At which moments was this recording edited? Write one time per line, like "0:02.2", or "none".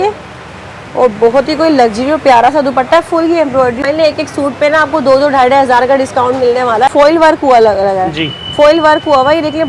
0:03.8
0:06.9